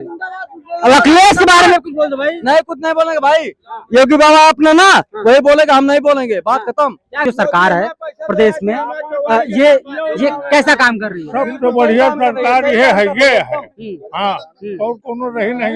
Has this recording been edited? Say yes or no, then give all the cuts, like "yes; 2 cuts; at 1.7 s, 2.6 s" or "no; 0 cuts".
yes; 1 cut; at 7.2 s